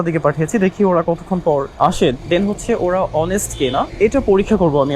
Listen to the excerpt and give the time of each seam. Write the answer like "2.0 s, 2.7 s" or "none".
1.7 s, 3.9 s